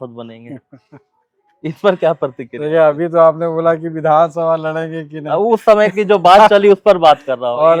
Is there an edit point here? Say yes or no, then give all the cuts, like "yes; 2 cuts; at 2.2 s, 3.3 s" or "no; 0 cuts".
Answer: no; 0 cuts